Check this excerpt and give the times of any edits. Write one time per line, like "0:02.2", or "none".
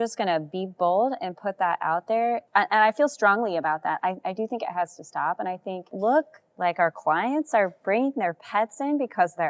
0:02.4
0:06.0